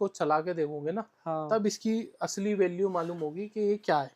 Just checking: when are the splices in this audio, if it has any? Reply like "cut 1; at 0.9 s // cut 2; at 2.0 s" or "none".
none